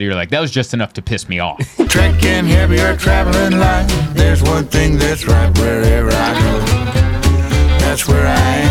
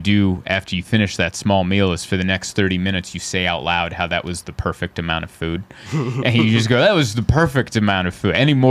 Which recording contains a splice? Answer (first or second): first